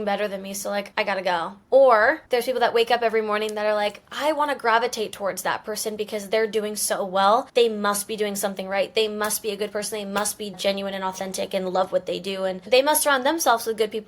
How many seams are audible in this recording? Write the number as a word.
two